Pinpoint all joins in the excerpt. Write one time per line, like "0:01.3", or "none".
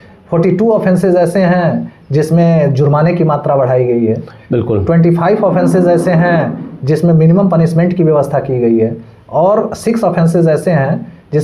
none

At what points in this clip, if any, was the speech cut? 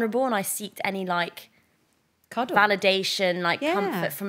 none

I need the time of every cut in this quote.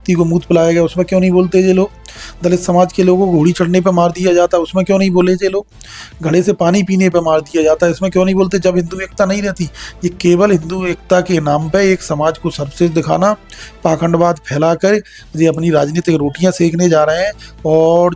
none

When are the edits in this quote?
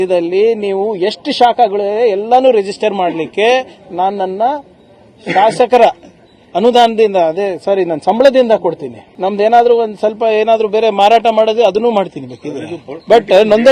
0:09.0

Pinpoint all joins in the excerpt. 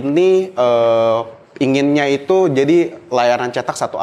none

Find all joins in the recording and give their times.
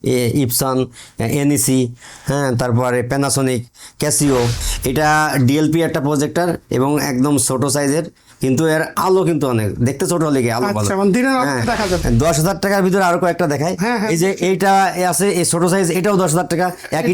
0:04.7
0:12.0

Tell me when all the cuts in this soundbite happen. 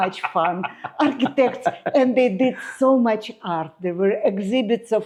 none

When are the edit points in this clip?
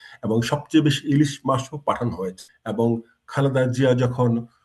0:02.5

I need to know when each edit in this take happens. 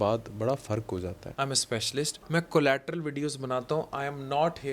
0:01.2
0:02.2

